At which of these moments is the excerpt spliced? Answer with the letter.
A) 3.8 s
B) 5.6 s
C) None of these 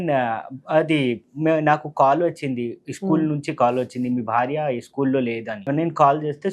B